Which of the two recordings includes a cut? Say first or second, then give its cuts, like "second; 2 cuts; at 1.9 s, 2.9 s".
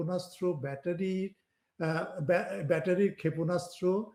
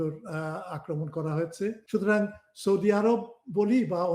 second; 1 cut; at 1.8 s